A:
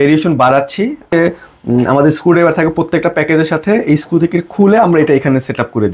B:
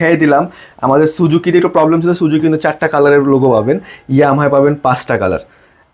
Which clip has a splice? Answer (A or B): A